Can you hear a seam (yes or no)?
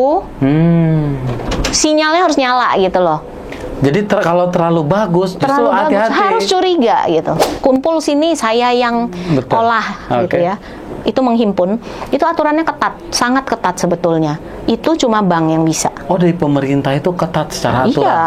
yes